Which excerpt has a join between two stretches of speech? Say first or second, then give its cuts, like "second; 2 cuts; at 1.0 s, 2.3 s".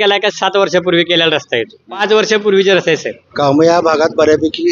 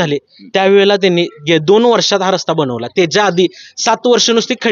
first; 2 cuts; at 2.0 s, 3.2 s